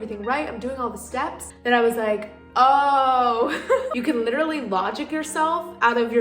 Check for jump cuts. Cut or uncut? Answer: cut